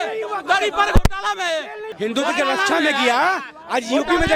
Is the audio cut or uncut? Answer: cut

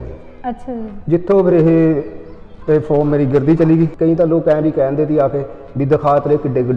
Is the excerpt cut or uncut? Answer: cut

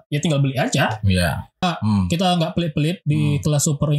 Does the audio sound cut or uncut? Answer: cut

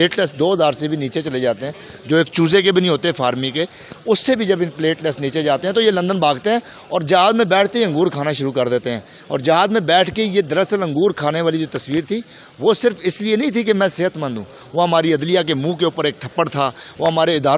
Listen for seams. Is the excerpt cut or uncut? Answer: uncut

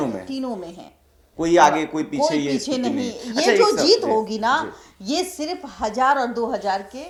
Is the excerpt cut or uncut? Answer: uncut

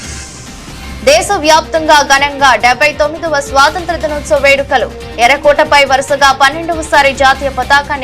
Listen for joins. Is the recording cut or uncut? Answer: cut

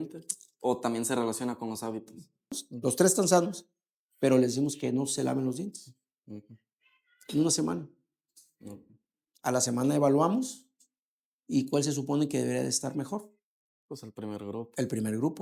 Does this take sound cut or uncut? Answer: cut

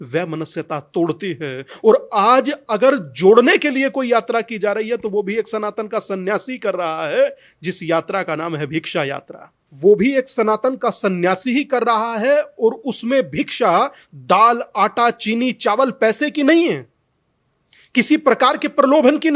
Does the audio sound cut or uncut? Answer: uncut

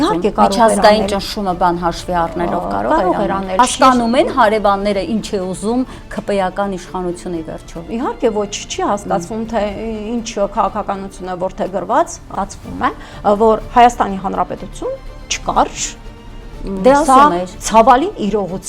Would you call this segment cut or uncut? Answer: cut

